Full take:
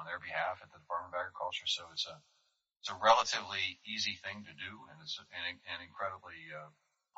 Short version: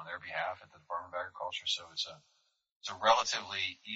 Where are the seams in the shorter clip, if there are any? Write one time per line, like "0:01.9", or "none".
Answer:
none